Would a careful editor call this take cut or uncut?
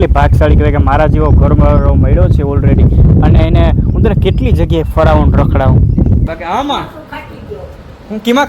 cut